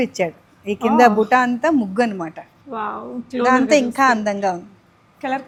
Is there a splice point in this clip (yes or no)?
no